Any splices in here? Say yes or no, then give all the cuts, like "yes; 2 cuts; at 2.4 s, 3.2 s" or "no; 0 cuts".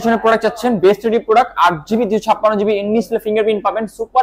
no; 0 cuts